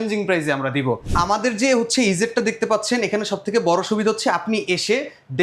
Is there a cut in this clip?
yes; 1 cut; at 1.1 s

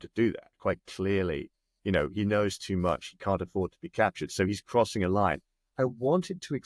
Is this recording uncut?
yes; 0 cuts

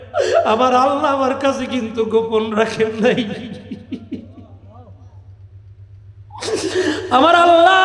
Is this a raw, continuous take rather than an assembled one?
yes; 0 cuts

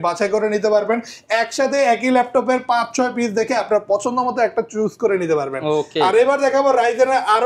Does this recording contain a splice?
no; 0 cuts

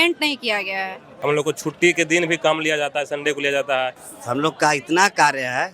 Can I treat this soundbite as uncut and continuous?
no; 2 cuts; at 1.1 s, 4.0 s

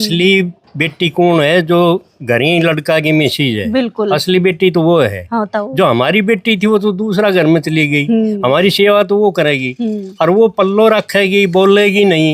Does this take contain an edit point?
no; 0 cuts

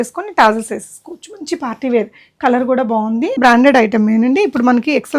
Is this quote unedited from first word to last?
no; 1 cut; at 3.4 s

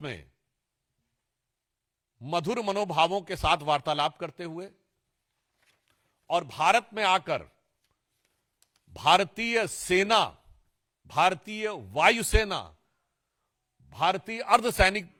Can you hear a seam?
no; 0 cuts

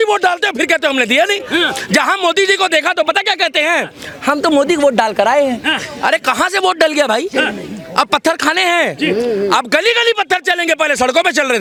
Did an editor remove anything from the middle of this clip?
no; 0 cuts

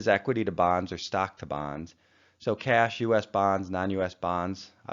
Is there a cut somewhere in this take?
no; 0 cuts

